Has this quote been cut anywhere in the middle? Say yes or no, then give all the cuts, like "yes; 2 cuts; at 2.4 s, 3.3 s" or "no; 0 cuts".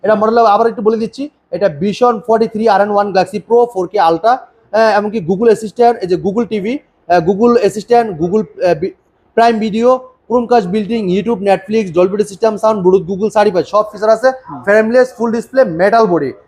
no; 0 cuts